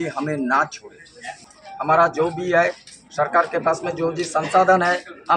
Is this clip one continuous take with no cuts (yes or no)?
no